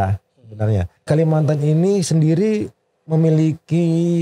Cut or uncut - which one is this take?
cut